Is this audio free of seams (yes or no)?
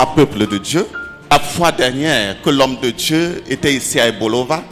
no